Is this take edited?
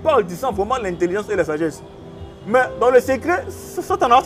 no; 0 cuts

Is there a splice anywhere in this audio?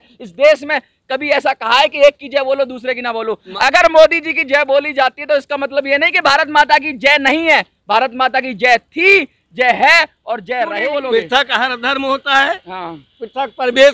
yes; 1 cut; at 10.7 s

